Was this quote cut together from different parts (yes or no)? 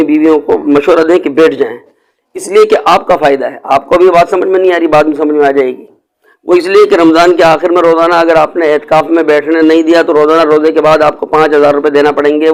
no